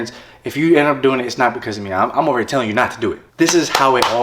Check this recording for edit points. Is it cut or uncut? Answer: cut